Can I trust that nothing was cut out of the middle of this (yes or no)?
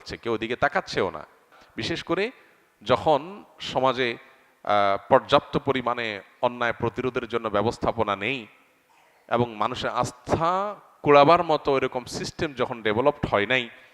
no